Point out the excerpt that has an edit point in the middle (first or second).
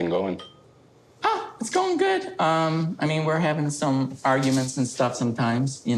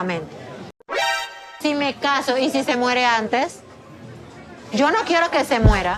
second